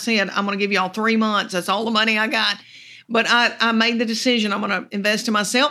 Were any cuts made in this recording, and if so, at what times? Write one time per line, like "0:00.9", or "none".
none

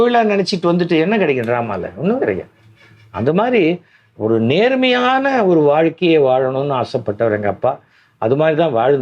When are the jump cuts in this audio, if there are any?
none

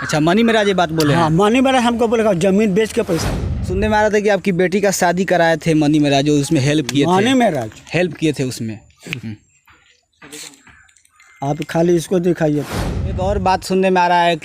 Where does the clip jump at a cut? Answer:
0:03.6
0:13.2

